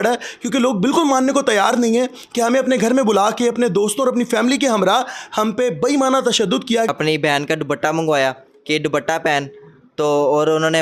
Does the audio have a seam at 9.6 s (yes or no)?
no